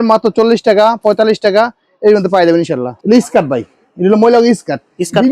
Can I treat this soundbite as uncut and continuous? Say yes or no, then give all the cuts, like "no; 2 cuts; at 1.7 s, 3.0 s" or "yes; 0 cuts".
no; 1 cut; at 2.9 s